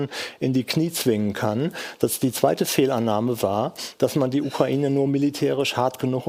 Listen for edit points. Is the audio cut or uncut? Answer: uncut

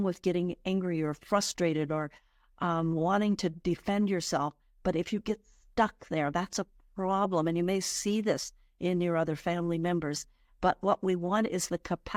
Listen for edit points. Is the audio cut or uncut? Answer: uncut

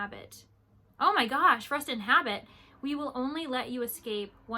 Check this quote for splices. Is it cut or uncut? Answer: uncut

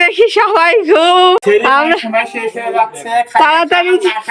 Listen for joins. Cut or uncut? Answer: cut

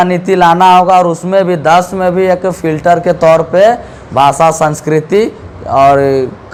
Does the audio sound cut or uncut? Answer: uncut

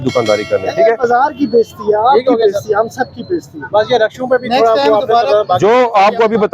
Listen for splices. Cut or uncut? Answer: uncut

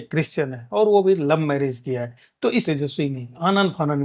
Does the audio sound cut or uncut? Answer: cut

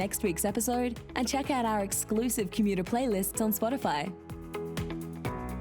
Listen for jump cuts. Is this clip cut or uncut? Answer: cut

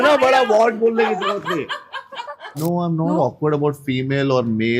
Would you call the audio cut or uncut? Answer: cut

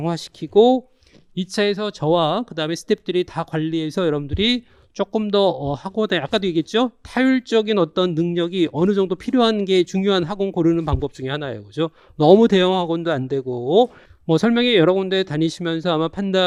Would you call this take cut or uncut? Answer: uncut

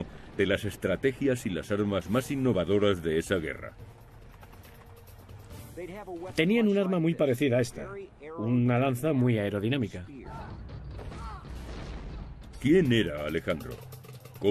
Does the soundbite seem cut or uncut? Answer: uncut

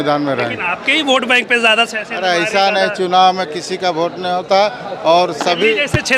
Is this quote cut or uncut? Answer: uncut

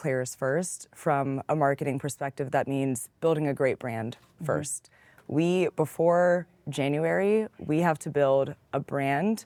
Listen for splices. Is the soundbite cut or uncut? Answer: uncut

